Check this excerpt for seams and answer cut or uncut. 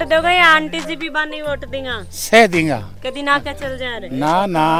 uncut